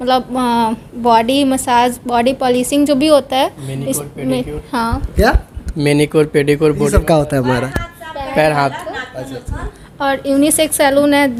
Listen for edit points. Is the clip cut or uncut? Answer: uncut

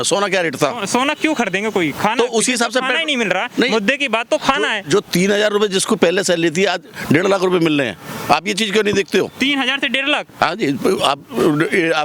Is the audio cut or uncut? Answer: uncut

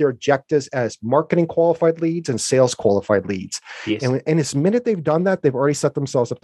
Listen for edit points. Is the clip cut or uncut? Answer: uncut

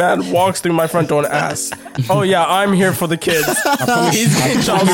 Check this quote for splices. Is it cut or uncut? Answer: uncut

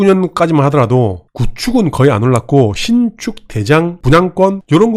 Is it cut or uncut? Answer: uncut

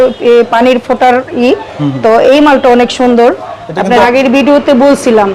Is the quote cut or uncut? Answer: cut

